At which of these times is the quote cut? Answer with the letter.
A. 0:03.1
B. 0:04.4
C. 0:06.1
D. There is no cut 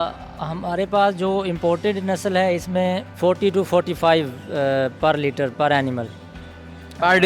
A